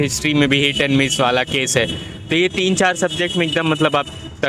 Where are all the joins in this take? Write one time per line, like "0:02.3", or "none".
none